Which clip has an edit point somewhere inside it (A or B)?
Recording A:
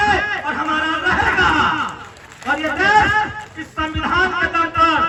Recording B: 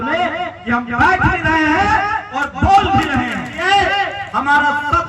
B